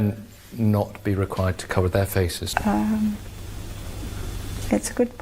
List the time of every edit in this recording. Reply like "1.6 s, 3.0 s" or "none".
2.4 s